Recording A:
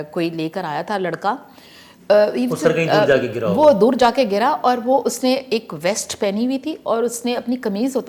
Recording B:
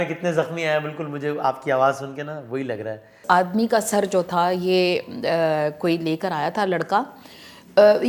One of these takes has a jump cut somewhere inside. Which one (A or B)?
B